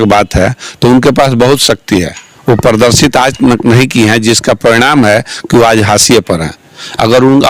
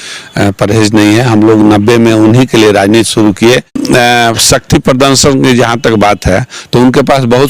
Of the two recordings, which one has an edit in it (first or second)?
second